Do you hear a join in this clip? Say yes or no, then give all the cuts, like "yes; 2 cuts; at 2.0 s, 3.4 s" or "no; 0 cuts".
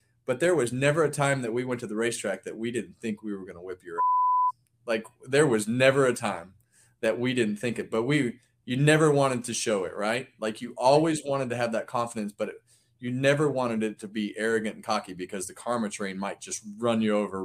no; 0 cuts